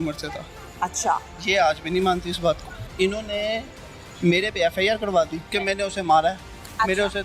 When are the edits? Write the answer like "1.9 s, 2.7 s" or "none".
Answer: 2.8 s, 5.5 s